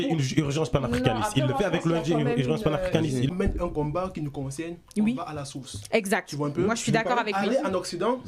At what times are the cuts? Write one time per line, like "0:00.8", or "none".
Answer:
0:03.3